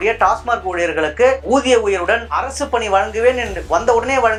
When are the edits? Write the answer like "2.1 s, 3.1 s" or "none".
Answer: none

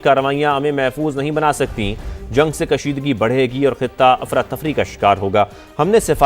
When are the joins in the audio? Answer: none

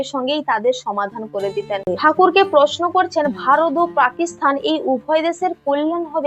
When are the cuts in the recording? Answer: 1.8 s

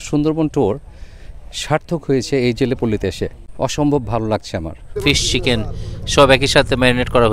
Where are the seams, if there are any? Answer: 3.4 s, 4.8 s

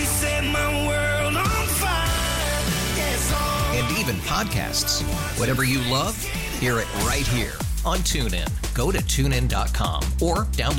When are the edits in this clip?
none

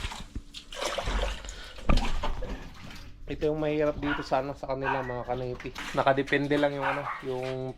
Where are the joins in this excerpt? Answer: 5.7 s

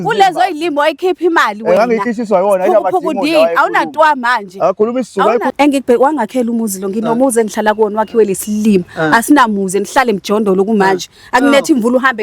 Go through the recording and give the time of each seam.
5.5 s

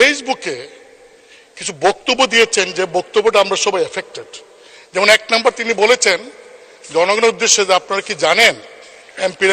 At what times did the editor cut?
none

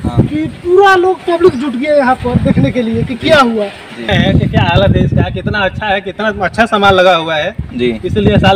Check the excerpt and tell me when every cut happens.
4.1 s

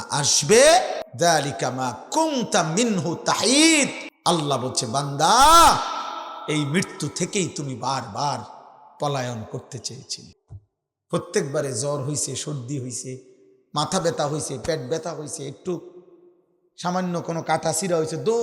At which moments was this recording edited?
1.0 s, 4.1 s

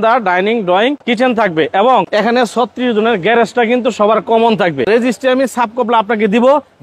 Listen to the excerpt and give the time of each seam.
1.0 s, 2.1 s, 4.9 s

